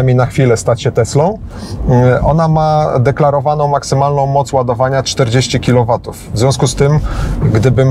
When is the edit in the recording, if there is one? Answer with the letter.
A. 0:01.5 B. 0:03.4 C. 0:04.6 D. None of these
D